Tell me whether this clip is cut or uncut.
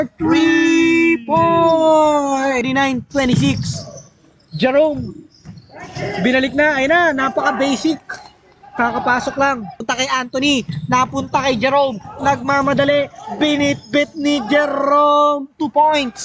cut